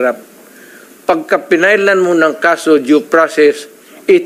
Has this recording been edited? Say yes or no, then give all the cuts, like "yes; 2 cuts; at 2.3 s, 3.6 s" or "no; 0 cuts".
no; 0 cuts